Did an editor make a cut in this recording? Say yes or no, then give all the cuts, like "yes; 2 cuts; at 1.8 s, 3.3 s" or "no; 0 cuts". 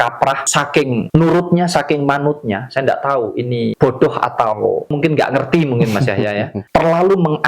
yes; 4 cuts; at 0.9 s, 3.8 s, 4.9 s, 6.6 s